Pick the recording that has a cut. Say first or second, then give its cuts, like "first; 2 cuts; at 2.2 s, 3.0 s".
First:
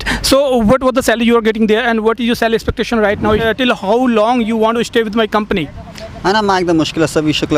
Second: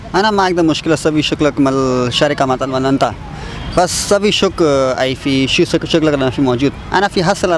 first; 1 cut; at 3.4 s